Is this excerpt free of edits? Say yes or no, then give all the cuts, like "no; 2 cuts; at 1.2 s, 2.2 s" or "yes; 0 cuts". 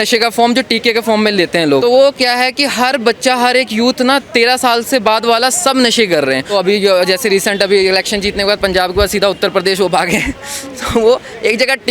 no; 2 cuts; at 1.8 s, 6.5 s